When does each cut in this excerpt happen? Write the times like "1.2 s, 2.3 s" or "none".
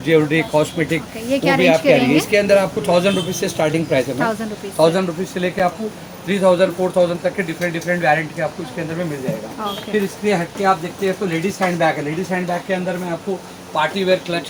none